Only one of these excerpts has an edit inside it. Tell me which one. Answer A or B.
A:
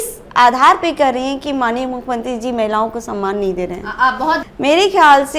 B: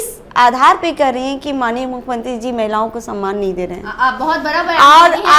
A